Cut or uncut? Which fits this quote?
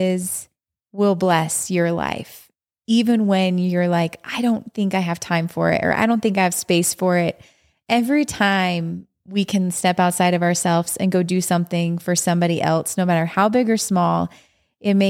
uncut